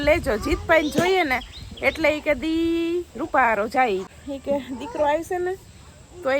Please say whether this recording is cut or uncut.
cut